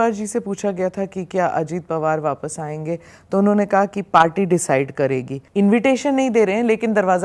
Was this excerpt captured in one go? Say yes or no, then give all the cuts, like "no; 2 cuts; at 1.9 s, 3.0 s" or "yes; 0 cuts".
no; 1 cut; at 5.4 s